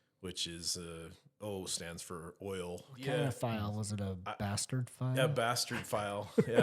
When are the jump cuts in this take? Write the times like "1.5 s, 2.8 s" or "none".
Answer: 3.0 s